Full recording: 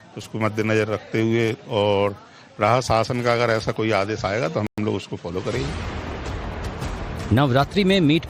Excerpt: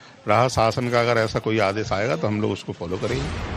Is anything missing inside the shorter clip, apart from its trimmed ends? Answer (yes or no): yes